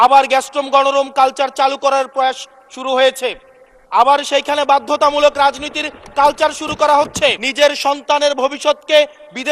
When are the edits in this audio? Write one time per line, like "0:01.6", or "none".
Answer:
0:07.4